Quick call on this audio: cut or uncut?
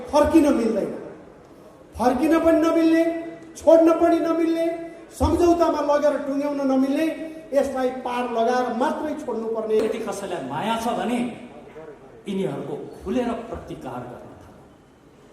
cut